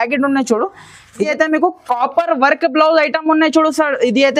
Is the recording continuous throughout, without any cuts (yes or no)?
no